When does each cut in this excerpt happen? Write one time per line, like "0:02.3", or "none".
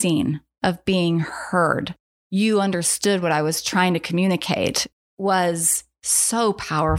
0:04.8